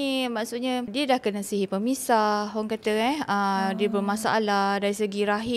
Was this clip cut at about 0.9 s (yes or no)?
yes